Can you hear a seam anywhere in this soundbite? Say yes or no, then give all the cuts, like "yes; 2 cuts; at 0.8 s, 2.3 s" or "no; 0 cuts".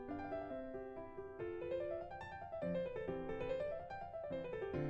no; 0 cuts